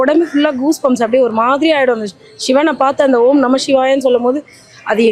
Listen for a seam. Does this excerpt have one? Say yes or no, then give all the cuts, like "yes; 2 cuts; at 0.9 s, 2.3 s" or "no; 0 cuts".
no; 0 cuts